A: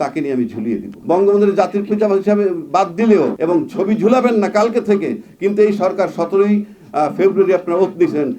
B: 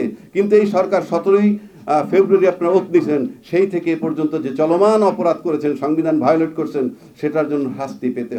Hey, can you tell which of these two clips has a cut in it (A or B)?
A